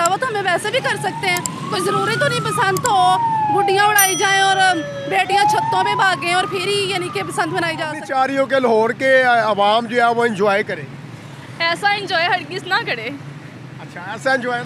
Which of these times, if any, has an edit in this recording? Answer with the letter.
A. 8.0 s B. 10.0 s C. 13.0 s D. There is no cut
A